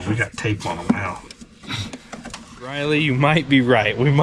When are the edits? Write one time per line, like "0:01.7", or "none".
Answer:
0:02.8